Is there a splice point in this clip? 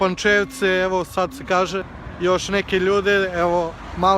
yes; 1 cut; at 2.0 s

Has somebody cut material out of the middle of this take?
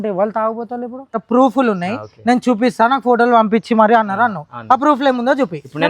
yes; 1 cut; at 1.1 s

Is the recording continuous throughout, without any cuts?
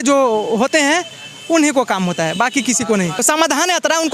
no; 1 cut; at 3.2 s

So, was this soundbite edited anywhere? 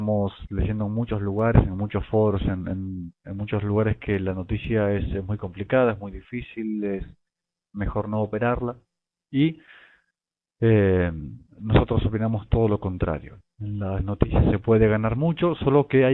no; 0 cuts

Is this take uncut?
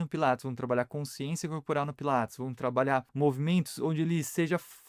no; 1 cut; at 3.1 s

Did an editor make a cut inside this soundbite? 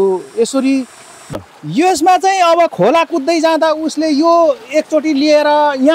yes; 1 cut; at 1.4 s

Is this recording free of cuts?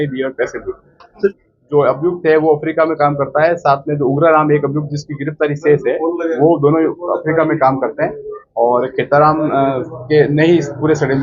no; 1 cut; at 1.3 s

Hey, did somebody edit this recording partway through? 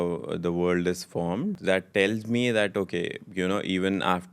yes; 1 cut; at 1.6 s

